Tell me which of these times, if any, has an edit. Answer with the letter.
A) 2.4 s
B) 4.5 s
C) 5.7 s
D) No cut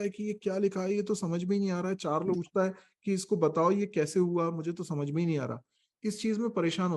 A